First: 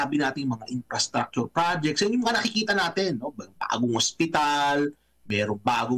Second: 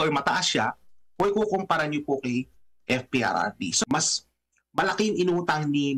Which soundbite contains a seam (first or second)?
second